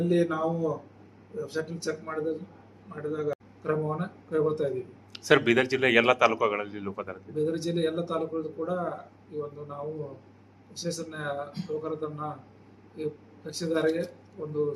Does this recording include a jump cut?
yes; 1 cut; at 3.3 s

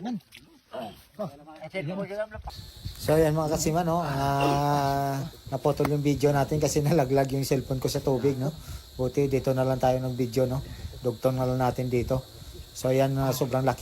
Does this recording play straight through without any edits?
no; 1 cut; at 2.4 s

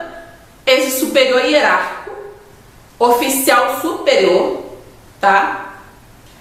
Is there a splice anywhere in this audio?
no; 0 cuts

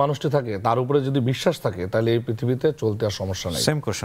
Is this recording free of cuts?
yes; 0 cuts

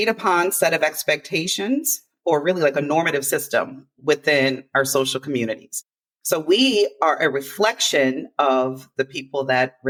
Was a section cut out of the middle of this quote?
no; 0 cuts

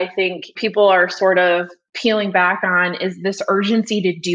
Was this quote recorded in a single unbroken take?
yes; 0 cuts

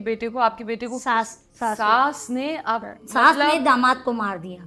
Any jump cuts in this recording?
yes; 2 cuts; at 1.4 s, 3.0 s

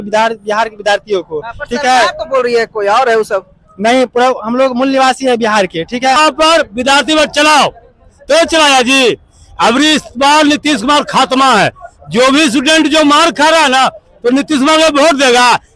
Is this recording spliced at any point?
yes; 1 cut; at 6.2 s

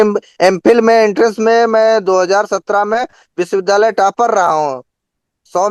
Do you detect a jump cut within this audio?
no; 0 cuts

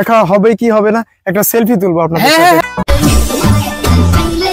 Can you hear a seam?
yes; 1 cut; at 2.6 s

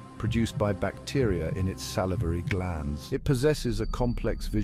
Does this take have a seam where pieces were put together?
yes; 1 cut; at 3.0 s

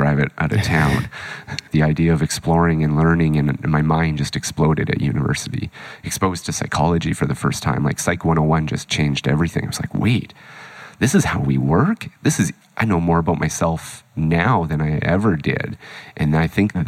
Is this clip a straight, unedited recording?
no; 1 cut; at 1.6 s

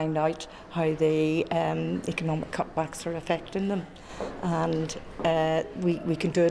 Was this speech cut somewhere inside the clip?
no; 0 cuts

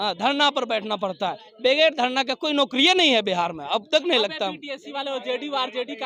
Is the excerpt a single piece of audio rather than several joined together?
yes; 0 cuts

